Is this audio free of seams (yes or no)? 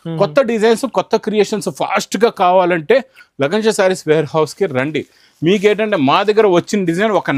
yes